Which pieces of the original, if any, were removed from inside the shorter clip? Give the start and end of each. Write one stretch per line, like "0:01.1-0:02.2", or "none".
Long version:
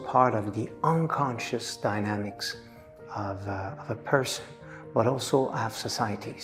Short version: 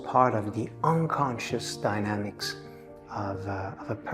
none